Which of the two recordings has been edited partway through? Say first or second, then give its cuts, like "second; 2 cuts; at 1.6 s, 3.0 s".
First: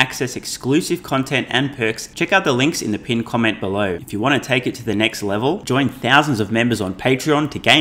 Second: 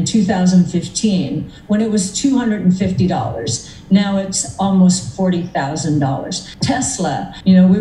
first; 2 cuts; at 2.1 s, 4.0 s